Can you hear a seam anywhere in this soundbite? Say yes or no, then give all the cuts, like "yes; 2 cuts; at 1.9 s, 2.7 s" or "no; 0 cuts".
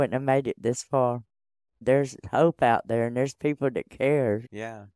yes; 1 cut; at 1.7 s